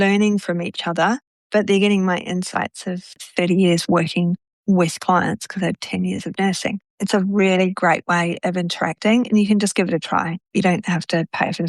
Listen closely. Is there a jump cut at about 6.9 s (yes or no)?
yes